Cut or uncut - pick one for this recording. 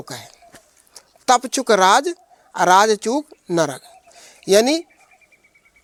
uncut